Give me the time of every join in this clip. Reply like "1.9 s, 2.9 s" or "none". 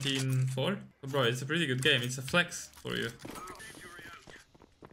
0.9 s, 3.6 s